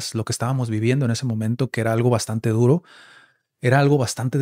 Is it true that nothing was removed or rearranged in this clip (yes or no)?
yes